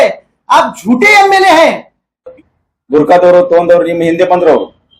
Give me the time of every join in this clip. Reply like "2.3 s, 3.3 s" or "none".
2.3 s